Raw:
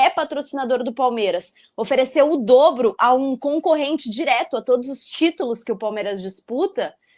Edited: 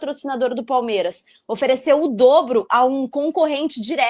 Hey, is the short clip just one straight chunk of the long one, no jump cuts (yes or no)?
yes